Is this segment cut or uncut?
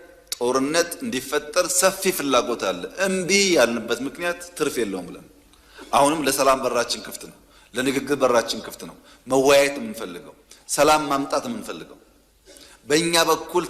uncut